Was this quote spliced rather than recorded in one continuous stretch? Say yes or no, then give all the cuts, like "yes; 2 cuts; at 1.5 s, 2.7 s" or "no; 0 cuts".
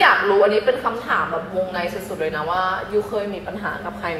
no; 0 cuts